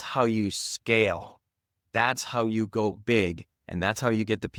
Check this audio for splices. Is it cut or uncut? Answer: uncut